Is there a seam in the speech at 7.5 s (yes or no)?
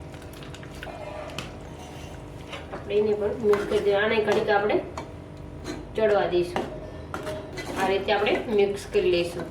yes